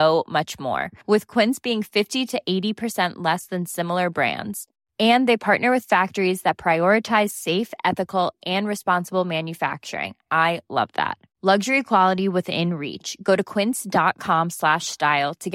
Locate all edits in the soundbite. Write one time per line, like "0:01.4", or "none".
none